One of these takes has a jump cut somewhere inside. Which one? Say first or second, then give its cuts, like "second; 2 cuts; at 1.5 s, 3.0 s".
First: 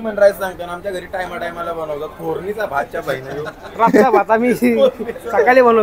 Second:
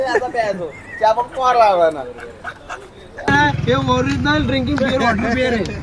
second; 1 cut; at 3.3 s